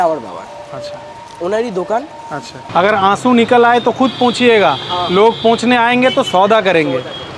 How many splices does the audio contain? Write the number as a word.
one